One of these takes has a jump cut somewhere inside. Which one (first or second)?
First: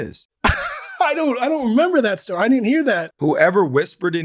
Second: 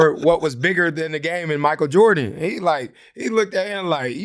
first